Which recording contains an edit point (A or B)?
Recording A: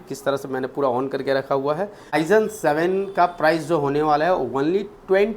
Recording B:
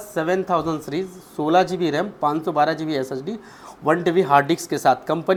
A